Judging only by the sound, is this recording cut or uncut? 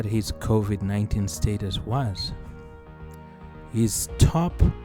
uncut